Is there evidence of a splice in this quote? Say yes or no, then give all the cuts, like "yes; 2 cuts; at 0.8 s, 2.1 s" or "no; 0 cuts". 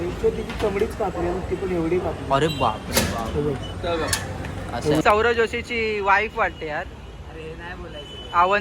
yes; 1 cut; at 5.0 s